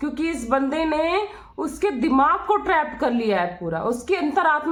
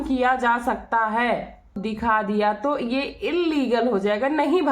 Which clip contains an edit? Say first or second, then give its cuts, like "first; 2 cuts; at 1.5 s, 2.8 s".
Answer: second; 1 cut; at 1.8 s